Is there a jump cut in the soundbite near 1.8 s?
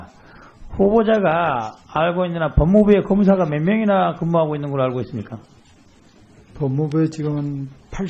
no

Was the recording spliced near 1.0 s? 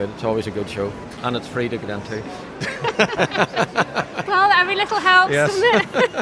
yes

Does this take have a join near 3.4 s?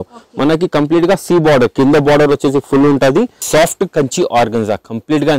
yes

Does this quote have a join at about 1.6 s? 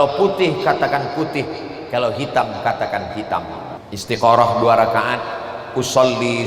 no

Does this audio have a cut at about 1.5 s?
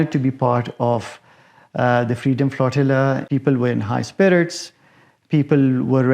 no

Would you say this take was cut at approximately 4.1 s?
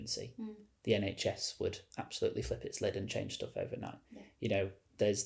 no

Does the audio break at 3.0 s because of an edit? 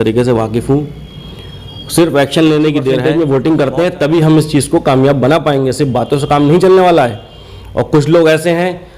yes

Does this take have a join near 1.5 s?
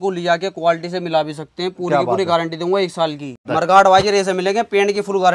no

